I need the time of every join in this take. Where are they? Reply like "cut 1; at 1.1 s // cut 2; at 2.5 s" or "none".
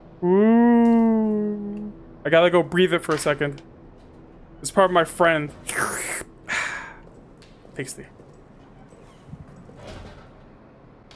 none